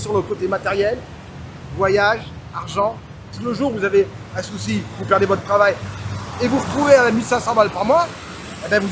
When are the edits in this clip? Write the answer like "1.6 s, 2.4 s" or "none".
3.3 s